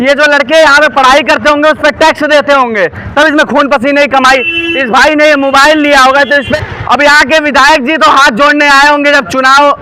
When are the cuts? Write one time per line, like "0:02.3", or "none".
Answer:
0:06.5